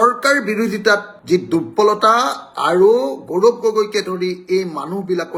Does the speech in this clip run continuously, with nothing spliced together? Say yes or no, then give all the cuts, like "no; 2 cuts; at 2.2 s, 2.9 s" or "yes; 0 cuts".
yes; 0 cuts